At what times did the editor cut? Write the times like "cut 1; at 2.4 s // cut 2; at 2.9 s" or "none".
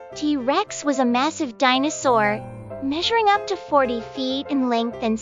none